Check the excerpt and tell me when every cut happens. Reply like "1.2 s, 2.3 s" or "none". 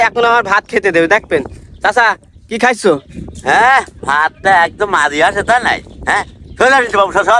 none